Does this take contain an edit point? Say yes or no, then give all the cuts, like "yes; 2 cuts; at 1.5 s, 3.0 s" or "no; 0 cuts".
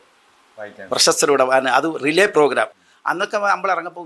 yes; 1 cut; at 2.8 s